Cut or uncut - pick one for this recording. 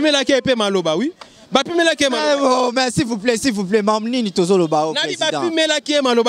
uncut